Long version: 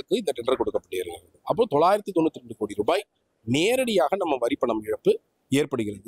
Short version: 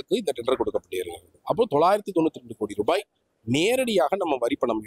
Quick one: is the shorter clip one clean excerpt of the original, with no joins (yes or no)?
yes